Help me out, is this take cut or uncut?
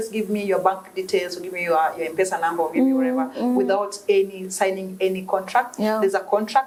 uncut